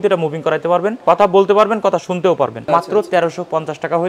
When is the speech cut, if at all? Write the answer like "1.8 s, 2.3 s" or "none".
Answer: 1.0 s, 2.6 s